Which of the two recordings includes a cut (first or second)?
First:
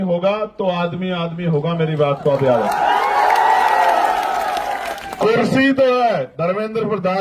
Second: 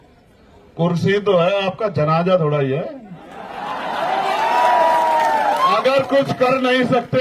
first